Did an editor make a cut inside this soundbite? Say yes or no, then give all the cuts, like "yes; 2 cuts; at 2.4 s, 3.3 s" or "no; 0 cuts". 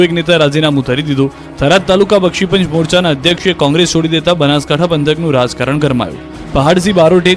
yes; 1 cut; at 5.5 s